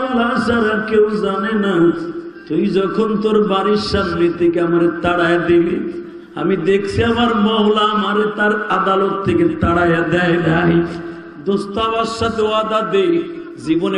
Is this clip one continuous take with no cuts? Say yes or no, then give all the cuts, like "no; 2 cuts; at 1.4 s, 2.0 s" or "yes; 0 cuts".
yes; 0 cuts